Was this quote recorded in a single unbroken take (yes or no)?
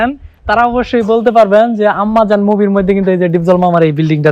yes